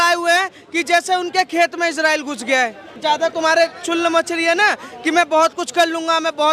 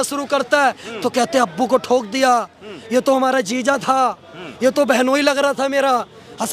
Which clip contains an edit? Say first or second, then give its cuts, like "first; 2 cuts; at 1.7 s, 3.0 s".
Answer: first; 1 cut; at 3.0 s